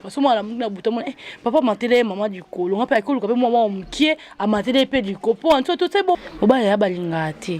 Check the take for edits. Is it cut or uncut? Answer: cut